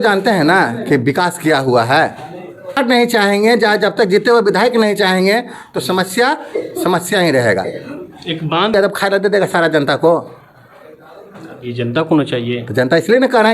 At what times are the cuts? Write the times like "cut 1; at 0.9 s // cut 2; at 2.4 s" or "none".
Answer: cut 1; at 2.8 s // cut 2; at 8.7 s